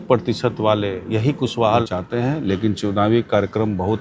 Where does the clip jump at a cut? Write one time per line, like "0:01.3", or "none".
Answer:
0:01.8